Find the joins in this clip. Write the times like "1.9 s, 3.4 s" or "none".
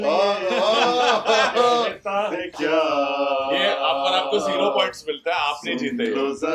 none